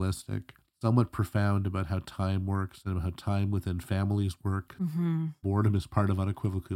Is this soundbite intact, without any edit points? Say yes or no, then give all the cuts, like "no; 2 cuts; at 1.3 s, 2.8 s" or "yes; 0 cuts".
yes; 0 cuts